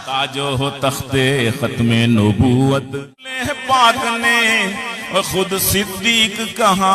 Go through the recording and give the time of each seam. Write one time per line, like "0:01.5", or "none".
0:02.9